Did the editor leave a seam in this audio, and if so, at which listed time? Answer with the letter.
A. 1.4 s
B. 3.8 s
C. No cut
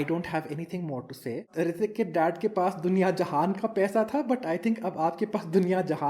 A